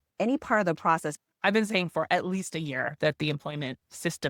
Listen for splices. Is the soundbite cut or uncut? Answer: cut